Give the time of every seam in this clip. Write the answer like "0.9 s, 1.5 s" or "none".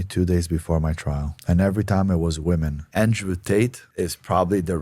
2.8 s